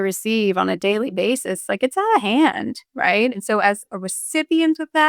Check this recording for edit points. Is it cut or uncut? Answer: cut